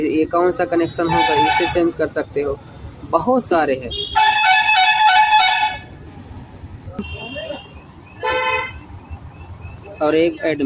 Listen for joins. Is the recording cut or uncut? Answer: cut